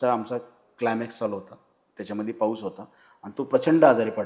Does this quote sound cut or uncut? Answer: uncut